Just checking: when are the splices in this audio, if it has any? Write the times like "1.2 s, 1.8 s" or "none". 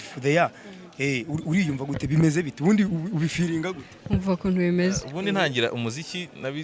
5.1 s